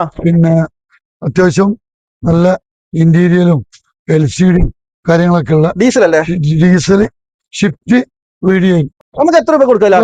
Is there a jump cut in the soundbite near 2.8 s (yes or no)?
no